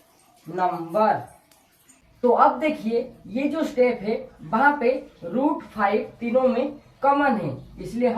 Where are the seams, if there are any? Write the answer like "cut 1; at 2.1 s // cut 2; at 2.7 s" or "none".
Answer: cut 1; at 2.0 s